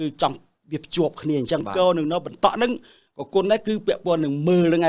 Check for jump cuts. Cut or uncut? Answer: cut